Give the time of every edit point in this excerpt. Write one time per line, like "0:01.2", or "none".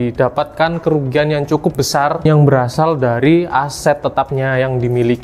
none